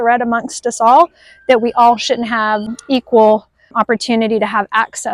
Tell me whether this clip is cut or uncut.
cut